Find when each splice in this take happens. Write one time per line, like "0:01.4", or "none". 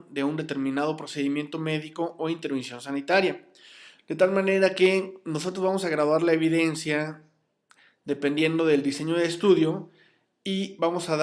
0:04.7